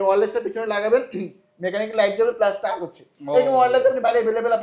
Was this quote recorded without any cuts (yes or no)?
yes